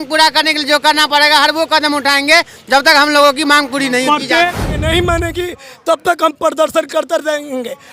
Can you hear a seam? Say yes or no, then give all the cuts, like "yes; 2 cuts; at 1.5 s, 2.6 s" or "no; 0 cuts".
yes; 1 cut; at 4.4 s